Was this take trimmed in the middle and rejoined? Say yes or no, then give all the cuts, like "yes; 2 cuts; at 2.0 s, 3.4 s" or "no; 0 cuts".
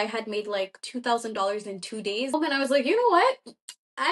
yes; 1 cut; at 2.3 s